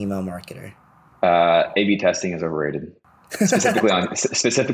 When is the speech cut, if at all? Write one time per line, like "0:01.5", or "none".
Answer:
none

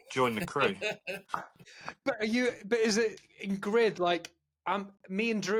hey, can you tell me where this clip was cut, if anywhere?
none

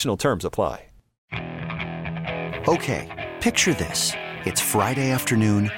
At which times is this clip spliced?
0:01.2

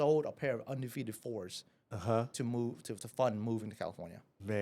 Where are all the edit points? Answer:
none

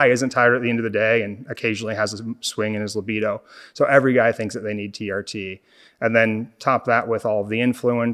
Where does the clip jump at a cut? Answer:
none

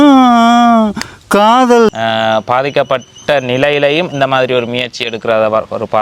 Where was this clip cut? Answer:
0:01.9

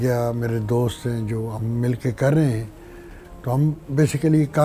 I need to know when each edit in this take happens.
none

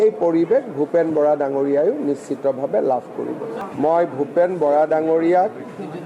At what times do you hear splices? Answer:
0:03.6

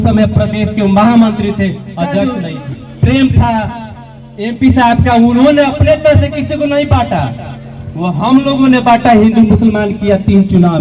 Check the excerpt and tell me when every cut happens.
0:02.5

